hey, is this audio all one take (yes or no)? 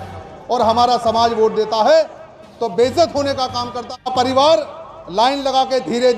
no